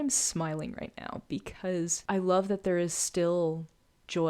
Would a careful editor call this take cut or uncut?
cut